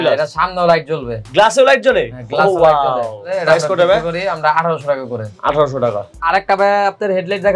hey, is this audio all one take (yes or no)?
yes